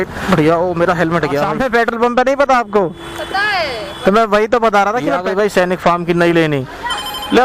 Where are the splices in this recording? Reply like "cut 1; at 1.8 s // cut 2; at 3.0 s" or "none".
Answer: cut 1; at 1.5 s // cut 2; at 5.2 s